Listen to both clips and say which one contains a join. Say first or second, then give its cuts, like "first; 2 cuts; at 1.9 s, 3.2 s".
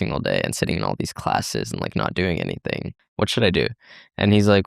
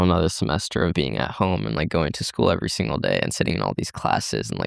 first; 1 cut; at 3.0 s